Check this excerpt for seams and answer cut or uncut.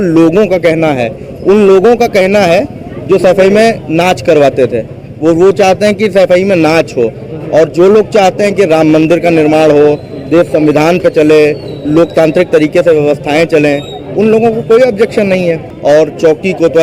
cut